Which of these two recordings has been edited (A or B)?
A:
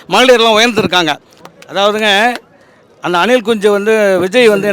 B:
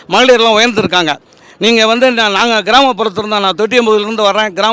A